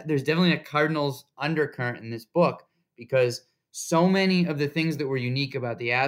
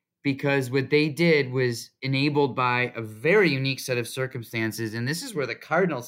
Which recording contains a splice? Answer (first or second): second